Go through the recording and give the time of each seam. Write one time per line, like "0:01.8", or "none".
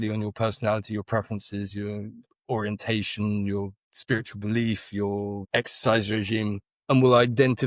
0:03.9
0:05.4